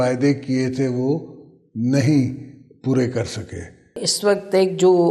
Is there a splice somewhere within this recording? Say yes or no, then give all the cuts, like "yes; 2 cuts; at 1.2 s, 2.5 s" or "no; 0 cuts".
yes; 1 cut; at 4.1 s